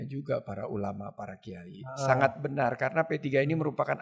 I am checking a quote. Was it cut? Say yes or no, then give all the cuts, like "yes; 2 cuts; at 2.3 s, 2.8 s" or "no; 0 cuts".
no; 0 cuts